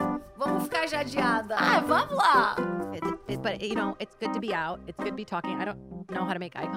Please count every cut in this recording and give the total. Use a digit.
0